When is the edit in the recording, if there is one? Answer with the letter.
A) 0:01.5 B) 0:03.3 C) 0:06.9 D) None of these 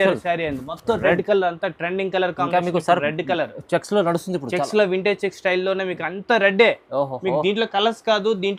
D